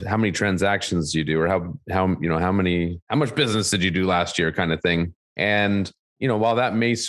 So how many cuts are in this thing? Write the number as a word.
one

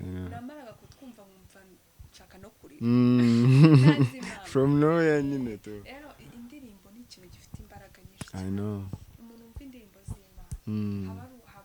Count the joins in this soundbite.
zero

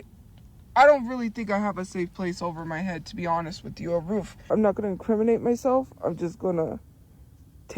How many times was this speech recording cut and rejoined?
one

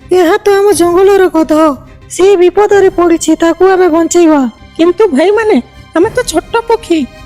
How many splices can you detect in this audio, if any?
two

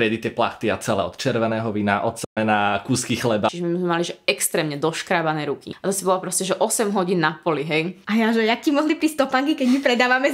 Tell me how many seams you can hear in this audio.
three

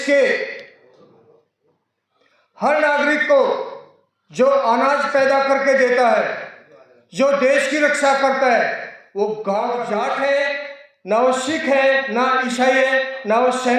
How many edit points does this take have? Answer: one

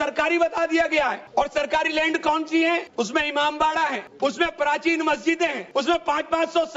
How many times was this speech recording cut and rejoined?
four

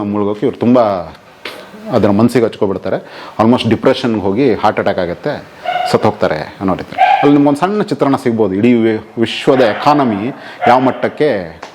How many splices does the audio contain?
zero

